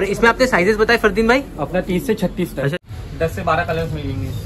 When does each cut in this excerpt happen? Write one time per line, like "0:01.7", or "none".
0:02.7